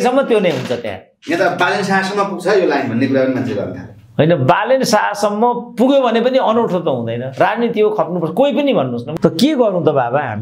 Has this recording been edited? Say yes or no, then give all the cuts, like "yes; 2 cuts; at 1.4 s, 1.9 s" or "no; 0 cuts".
yes; 1 cut; at 9.0 s